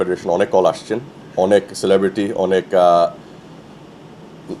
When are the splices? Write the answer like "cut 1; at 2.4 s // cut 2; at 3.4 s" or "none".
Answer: none